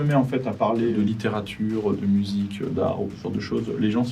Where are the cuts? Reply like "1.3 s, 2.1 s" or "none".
0.9 s